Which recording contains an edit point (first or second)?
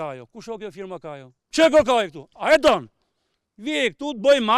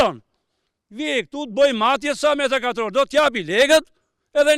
first